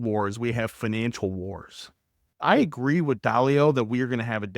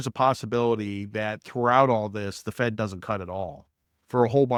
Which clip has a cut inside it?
first; 1 cut; at 2.4 s

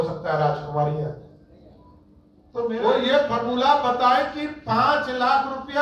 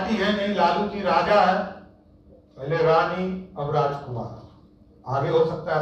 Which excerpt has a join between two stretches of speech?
first; 1 cut; at 2.7 s

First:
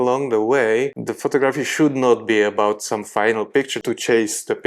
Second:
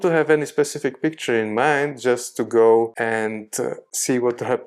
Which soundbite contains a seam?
first; 2 cuts; at 1.0 s, 3.7 s

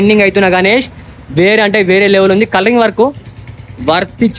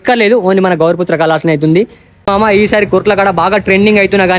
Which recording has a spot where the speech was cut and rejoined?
second; 1 cut; at 2.3 s

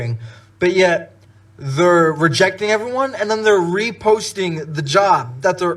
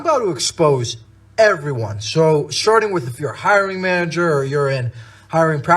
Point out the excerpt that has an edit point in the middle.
second; 1 cut; at 2.8 s

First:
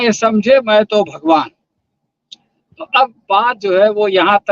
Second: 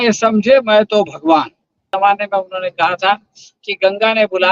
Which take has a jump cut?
second; 1 cut; at 1.9 s

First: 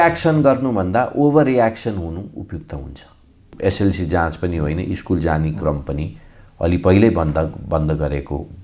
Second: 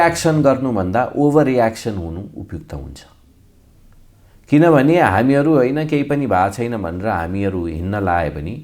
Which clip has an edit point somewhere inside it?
first; 1 cut; at 3.4 s

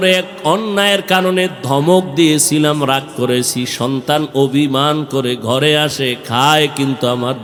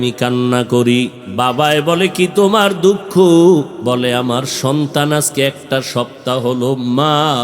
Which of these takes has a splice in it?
second; 2 cuts; at 1.2 s, 3.7 s

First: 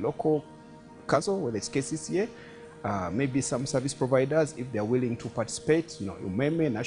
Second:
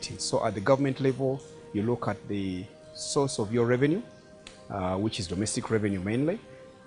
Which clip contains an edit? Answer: first; 1 cut; at 1.1 s

